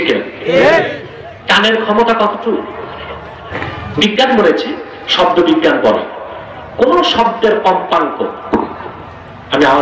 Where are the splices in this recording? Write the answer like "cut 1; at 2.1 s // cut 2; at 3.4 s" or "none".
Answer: cut 1; at 3.4 s

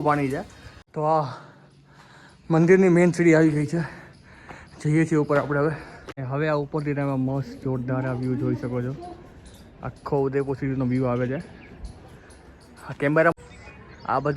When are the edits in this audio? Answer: cut 1; at 0.9 s // cut 2; at 13.3 s

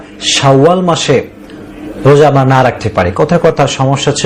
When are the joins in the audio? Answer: none

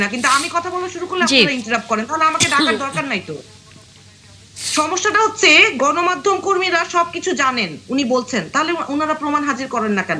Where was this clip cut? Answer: none

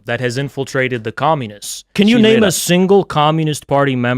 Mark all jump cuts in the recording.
cut 1; at 1.9 s

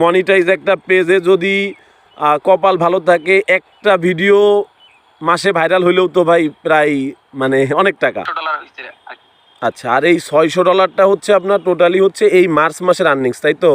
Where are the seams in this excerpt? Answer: cut 1; at 8.3 s

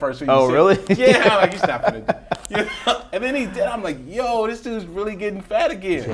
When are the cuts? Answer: none

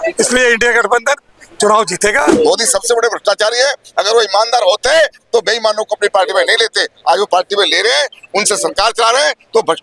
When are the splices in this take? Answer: cut 1; at 2.3 s

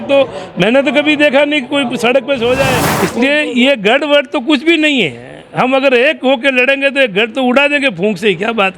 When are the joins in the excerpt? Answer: cut 1; at 2.9 s

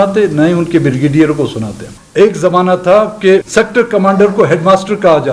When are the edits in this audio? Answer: cut 1; at 2.0 s // cut 2; at 3.5 s

